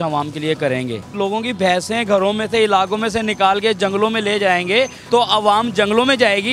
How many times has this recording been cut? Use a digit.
2